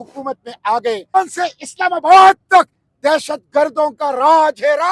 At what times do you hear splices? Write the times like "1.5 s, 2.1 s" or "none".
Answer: 1.2 s